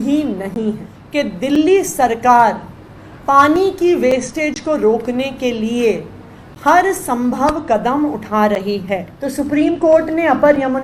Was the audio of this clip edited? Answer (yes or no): yes